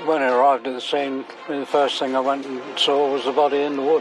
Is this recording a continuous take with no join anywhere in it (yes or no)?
yes